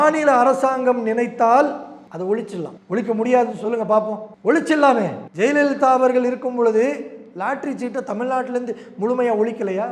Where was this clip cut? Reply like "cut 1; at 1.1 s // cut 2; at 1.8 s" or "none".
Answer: cut 1; at 2.0 s // cut 2; at 2.8 s // cut 3; at 4.2 s // cut 4; at 5.2 s